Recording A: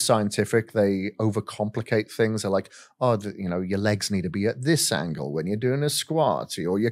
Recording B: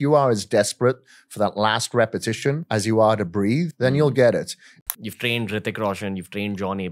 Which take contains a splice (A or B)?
B